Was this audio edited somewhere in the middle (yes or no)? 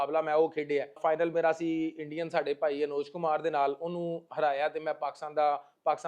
yes